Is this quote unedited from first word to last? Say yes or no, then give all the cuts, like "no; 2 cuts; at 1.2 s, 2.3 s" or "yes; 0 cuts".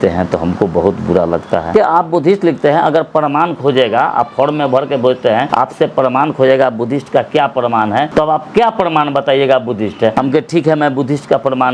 no; 4 cuts; at 1.7 s, 5.5 s, 8.1 s, 10.1 s